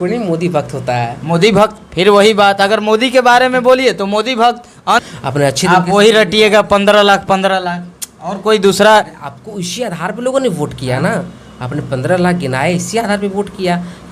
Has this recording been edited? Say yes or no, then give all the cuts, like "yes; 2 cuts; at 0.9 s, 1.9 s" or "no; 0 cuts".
yes; 1 cut; at 5.0 s